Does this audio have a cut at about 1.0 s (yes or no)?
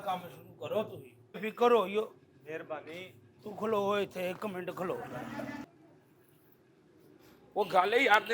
yes